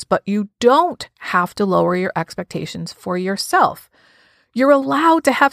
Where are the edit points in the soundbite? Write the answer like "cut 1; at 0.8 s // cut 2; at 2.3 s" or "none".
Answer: none